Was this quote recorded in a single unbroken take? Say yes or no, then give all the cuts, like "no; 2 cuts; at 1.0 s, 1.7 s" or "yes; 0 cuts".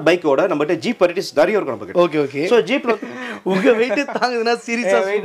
no; 1 cut; at 2.9 s